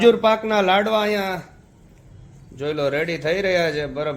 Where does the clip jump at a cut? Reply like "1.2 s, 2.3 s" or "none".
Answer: none